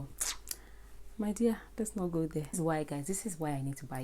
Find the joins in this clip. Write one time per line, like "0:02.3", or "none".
0:02.6